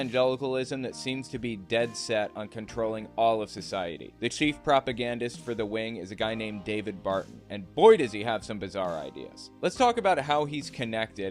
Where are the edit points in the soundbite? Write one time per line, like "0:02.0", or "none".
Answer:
none